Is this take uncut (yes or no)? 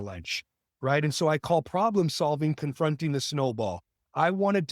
yes